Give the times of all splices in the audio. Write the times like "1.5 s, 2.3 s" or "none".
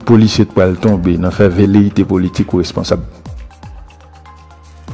3.1 s